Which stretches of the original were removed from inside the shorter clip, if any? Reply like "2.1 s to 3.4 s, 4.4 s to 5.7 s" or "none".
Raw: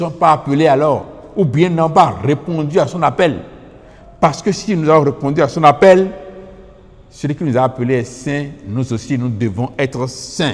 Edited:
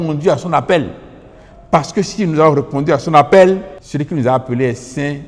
6.3 s to 7.1 s